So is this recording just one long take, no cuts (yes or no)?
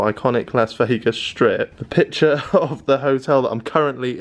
no